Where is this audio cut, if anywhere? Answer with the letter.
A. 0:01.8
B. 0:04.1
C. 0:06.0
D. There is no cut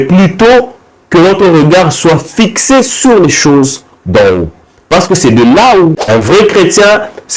C